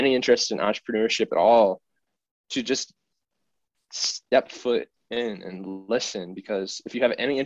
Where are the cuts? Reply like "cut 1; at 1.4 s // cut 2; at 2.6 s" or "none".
none